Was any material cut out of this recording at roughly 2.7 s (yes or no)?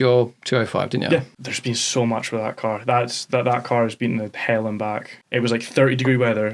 no